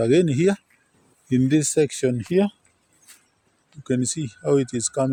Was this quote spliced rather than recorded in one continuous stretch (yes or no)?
no